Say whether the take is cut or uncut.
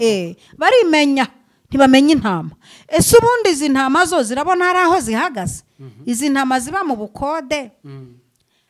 uncut